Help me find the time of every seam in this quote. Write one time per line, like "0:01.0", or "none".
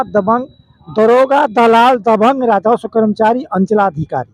none

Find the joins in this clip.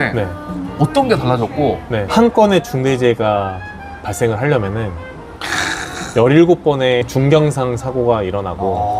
0:02.1
0:07.0

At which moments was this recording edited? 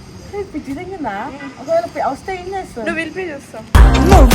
none

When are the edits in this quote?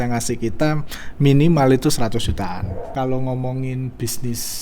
0:02.9

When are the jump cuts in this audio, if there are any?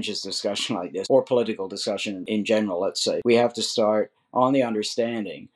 0:01.0
0:02.2
0:03.2

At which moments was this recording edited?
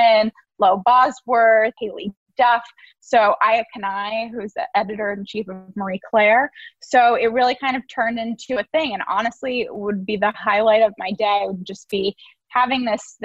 none

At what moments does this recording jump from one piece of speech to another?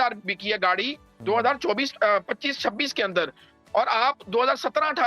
none

